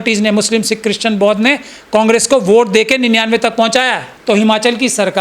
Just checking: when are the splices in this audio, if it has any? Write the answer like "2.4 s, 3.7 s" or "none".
4.1 s